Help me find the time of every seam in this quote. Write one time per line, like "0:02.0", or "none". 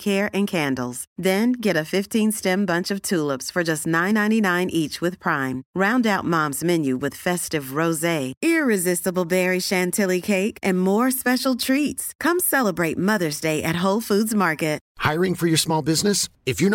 0:14.9